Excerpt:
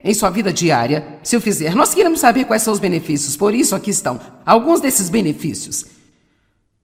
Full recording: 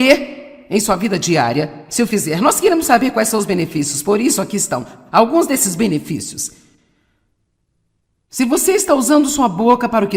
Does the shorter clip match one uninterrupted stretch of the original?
yes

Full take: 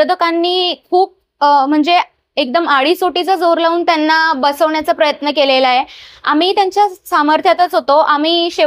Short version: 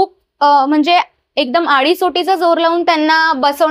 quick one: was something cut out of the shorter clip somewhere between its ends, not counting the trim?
no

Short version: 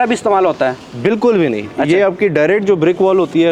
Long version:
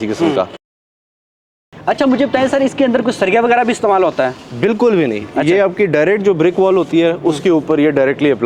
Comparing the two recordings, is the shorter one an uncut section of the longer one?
yes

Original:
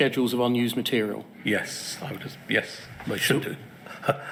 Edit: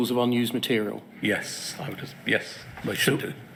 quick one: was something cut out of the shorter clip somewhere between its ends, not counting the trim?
no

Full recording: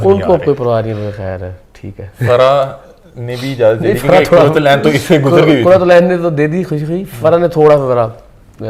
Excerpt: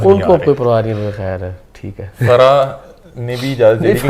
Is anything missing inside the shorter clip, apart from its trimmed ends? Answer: no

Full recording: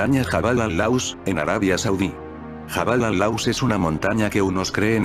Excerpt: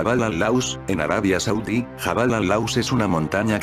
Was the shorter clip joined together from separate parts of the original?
yes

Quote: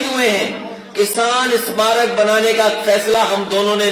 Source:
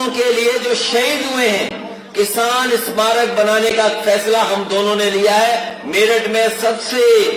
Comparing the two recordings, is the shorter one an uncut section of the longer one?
yes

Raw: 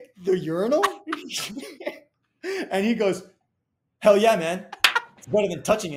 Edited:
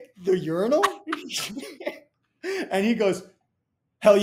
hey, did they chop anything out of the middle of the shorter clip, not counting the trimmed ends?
no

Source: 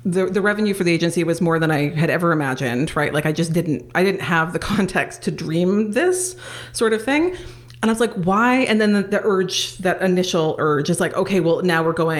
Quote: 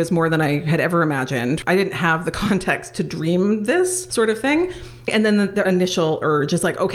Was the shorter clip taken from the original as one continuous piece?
no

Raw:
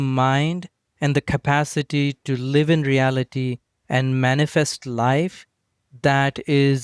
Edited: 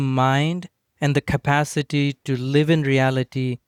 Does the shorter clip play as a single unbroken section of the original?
yes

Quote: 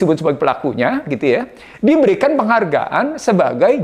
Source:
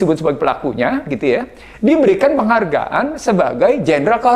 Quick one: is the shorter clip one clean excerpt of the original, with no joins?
yes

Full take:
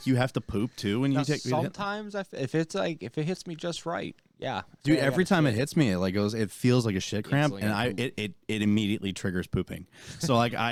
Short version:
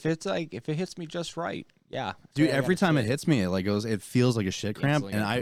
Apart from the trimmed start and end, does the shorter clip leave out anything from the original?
no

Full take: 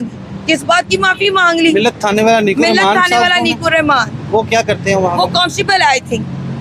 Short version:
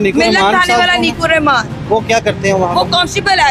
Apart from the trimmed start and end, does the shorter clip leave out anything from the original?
no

